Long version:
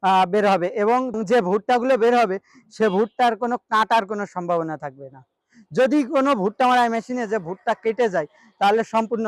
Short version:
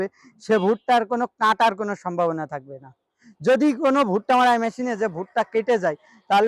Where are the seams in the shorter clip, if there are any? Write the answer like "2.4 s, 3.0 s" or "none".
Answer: none